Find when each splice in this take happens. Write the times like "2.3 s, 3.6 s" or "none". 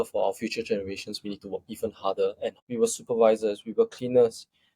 2.6 s